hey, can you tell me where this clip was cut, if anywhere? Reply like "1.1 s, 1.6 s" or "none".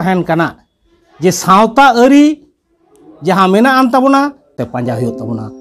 4.5 s